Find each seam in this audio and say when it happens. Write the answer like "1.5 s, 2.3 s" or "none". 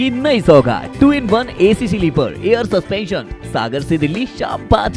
none

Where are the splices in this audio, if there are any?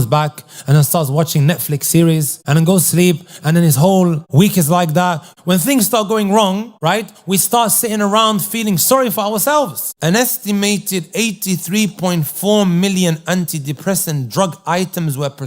2.4 s, 4.2 s, 5.3 s, 6.7 s, 9.8 s

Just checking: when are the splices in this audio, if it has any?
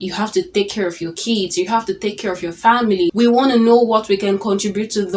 3.1 s

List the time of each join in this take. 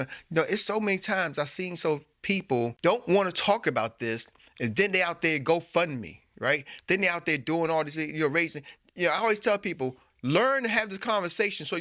2.8 s

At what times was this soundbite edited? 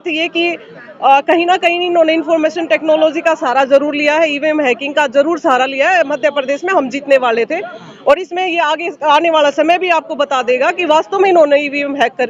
none

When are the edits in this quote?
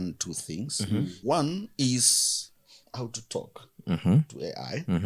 1.2 s

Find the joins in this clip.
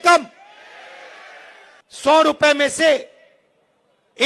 1.8 s

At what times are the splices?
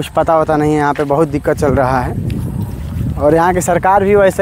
none

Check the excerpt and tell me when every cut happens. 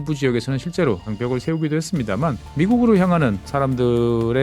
1.1 s, 2.4 s, 3.4 s

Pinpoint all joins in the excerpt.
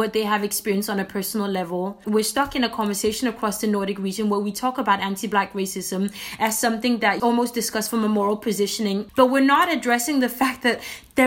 2.0 s, 7.2 s, 9.0 s

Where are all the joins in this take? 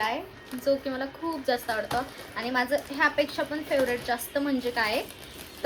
none

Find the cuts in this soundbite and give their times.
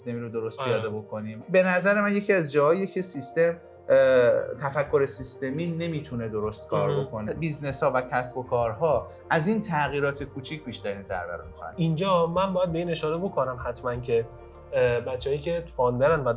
1.3 s, 7.3 s, 11.7 s

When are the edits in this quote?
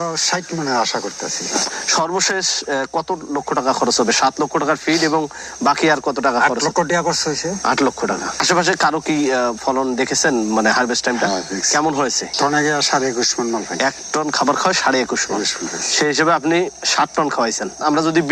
1.6 s

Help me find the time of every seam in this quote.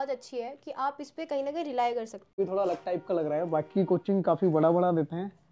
2.3 s

